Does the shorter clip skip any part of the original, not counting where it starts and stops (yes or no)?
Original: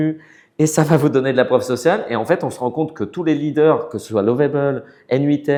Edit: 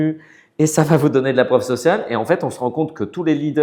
no